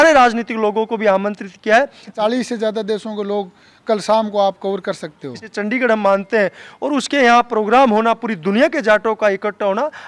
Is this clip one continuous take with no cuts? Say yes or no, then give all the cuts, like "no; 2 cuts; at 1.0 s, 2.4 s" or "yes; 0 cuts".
no; 2 cuts; at 2.1 s, 5.5 s